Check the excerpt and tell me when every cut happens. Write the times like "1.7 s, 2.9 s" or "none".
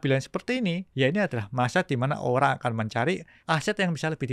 0.8 s, 3.3 s